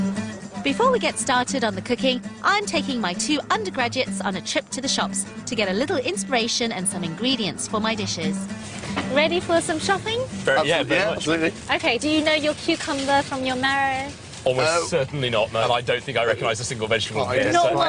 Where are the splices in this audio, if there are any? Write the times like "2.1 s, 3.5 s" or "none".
11.0 s